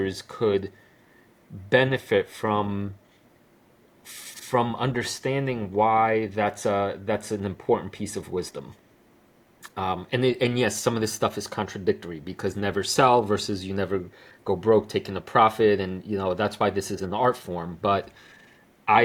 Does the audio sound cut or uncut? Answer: uncut